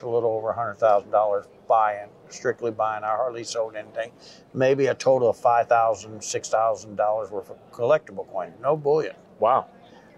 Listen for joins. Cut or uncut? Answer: uncut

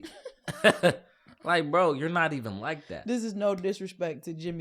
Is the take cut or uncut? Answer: uncut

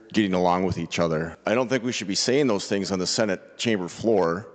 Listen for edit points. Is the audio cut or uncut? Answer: cut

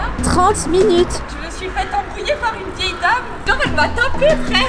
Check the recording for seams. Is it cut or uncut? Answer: uncut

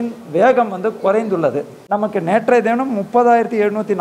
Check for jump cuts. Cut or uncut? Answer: cut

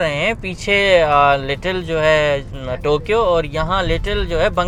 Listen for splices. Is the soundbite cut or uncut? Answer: uncut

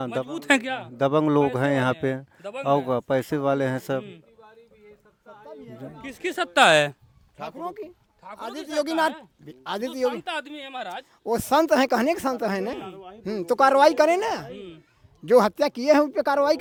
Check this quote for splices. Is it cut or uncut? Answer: uncut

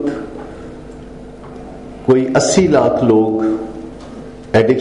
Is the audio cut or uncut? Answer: uncut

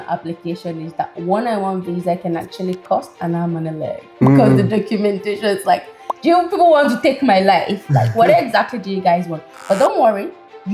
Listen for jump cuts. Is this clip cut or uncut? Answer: uncut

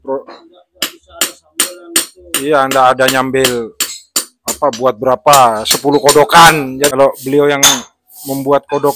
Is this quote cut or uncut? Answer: cut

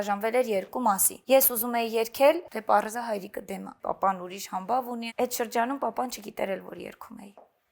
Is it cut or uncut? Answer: cut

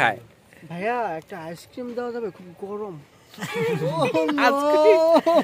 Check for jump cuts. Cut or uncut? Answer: uncut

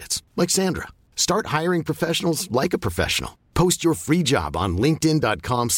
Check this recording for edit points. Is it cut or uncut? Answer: uncut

